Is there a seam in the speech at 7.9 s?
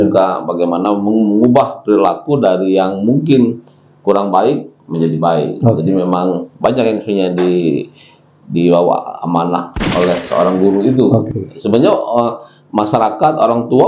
no; 1 cut; at 11.4 s

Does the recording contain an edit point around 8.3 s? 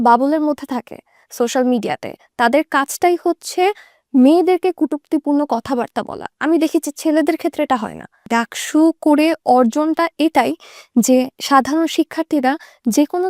yes; 1 cut; at 8.3 s

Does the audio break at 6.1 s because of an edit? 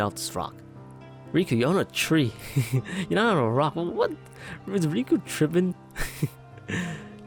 no; 0 cuts

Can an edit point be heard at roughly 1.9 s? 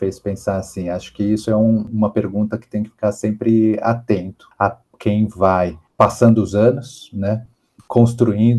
yes; 2 cuts; at 1.9 s, 4.4 s

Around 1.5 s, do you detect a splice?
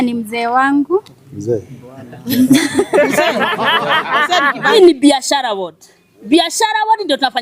no; 1 cut; at 4.7 s

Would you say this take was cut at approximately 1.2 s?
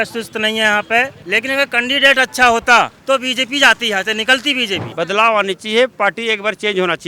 yes; 3 cuts; at 1.2 s, 3.0 s, 4.8 s

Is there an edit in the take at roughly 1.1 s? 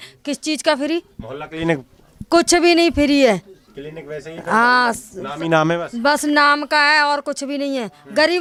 no; 0 cuts

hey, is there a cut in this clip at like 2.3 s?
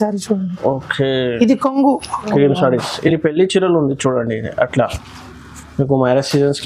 yes; 1 cut; at 2.3 s

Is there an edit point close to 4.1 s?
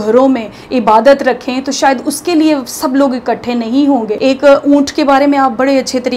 yes; 1 cut; at 4.1 s

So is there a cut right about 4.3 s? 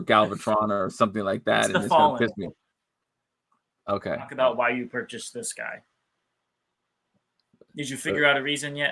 yes; 1 cut; at 4.3 s

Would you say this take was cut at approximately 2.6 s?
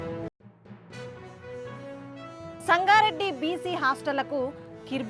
yes; 1 cut; at 2.6 s

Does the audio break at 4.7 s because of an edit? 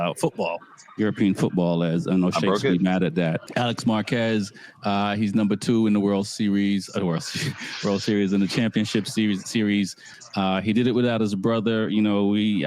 no; 2 cuts; at 3.4 s, 10.2 s

